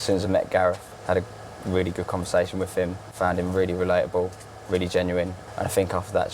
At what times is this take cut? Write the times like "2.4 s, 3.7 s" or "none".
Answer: 0.9 s, 3.1 s, 5.4 s